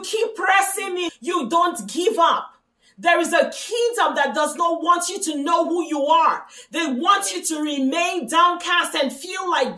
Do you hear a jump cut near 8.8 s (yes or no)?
no